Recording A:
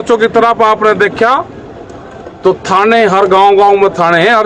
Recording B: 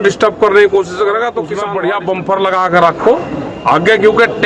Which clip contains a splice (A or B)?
B